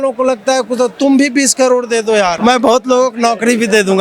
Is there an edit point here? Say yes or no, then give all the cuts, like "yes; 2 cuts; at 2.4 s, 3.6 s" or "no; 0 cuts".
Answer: yes; 1 cut; at 2.4 s